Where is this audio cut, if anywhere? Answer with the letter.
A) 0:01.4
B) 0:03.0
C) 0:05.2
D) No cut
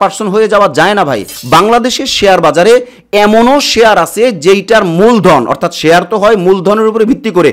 A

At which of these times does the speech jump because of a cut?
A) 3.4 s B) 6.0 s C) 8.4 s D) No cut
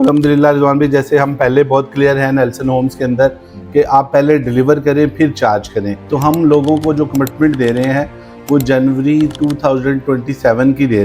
B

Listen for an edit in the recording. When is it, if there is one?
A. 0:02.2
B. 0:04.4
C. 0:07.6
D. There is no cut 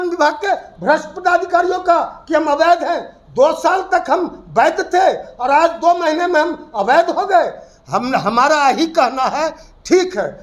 D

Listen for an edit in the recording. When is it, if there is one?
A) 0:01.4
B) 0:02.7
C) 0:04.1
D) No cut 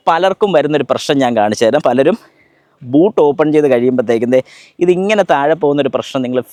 D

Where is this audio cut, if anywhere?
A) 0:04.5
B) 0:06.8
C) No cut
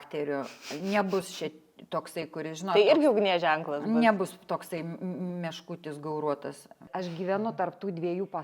B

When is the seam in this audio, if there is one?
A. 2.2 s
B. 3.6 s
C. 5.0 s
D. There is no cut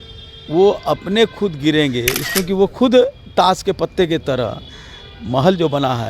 A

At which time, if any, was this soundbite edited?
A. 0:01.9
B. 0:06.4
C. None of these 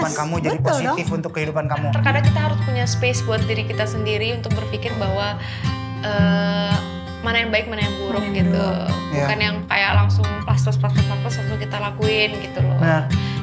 A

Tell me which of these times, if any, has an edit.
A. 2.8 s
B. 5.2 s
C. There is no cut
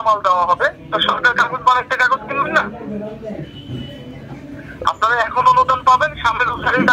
C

